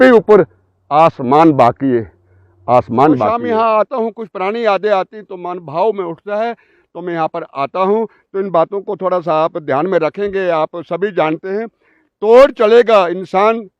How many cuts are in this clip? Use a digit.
1